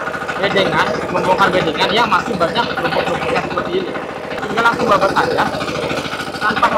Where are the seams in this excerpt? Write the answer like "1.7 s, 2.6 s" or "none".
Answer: 4.4 s